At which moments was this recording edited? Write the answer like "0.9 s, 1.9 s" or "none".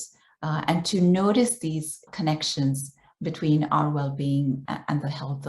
2.1 s, 4.6 s